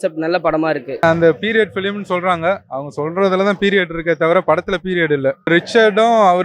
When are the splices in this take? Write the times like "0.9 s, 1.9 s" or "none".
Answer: 1.0 s, 5.5 s